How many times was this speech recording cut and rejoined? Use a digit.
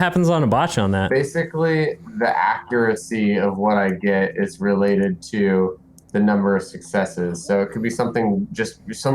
1